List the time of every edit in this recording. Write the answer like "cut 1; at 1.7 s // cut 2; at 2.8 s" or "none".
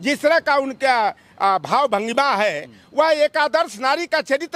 none